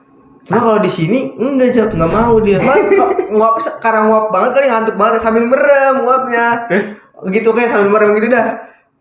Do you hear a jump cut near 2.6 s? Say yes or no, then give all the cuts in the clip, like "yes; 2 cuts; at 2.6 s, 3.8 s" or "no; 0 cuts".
yes; 1 cut; at 2.6 s